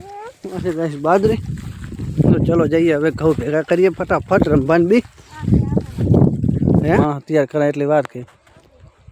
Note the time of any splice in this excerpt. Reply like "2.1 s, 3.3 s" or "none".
7.1 s